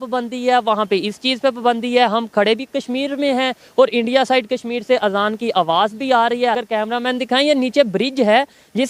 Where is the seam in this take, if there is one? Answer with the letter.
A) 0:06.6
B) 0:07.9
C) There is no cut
A